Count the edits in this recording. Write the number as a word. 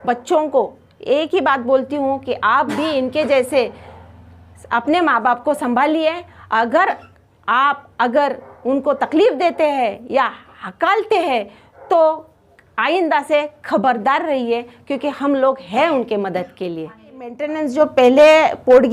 one